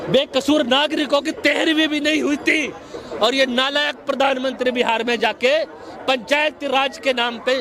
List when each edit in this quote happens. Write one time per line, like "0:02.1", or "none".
none